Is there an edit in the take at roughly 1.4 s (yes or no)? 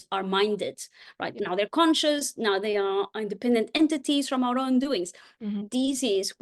yes